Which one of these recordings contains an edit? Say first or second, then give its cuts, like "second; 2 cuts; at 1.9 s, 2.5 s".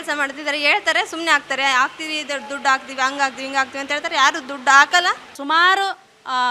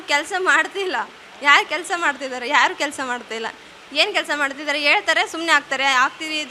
first; 1 cut; at 5.3 s